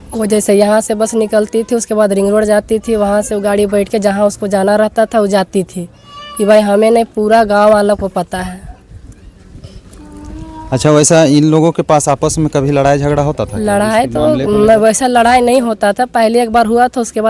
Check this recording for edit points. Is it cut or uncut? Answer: uncut